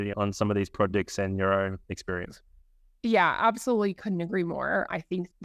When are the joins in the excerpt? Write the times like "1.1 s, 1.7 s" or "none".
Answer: 1.8 s